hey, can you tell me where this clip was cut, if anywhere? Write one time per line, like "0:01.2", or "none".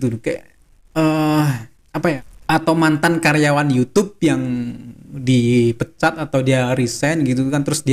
0:02.3